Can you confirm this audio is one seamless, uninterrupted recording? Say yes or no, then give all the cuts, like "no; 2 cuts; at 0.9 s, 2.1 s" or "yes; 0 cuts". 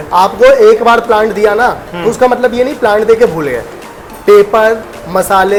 yes; 0 cuts